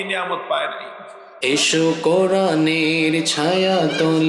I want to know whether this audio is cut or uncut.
cut